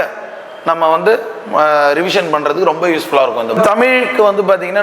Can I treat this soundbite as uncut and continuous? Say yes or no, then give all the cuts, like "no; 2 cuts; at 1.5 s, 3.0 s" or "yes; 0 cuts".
no; 1 cut; at 3.6 s